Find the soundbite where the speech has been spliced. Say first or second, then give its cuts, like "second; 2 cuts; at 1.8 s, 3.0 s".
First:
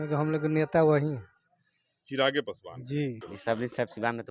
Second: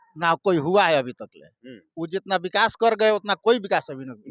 first; 1 cut; at 3.3 s